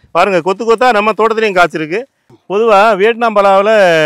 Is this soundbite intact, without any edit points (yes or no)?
no